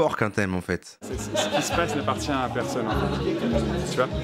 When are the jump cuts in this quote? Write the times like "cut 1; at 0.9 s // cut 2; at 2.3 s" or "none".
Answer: cut 1; at 0.9 s